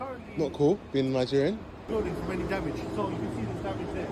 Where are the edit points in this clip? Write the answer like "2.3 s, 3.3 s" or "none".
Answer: 1.9 s

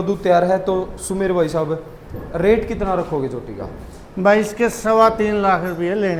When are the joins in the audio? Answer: none

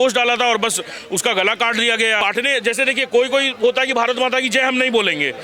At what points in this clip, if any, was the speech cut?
2.2 s

